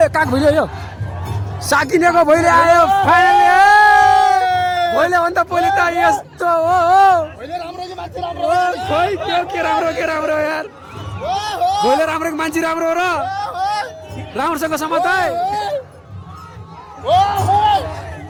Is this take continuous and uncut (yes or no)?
yes